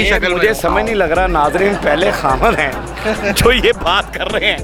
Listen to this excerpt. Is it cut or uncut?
uncut